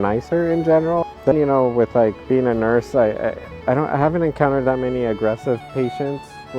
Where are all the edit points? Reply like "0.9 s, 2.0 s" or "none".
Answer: 1.3 s